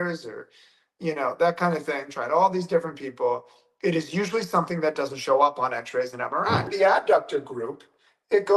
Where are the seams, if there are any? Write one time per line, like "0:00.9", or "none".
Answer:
0:06.7